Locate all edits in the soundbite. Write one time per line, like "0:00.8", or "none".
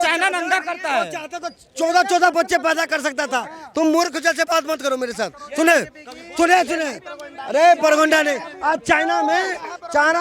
none